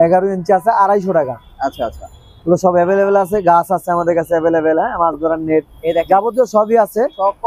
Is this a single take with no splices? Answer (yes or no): yes